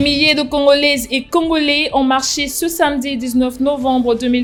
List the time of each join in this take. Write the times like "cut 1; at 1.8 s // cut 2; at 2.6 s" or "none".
none